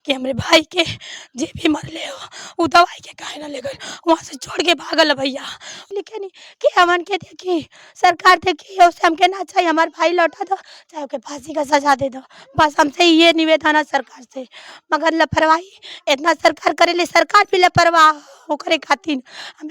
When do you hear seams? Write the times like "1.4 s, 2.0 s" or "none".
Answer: 5.8 s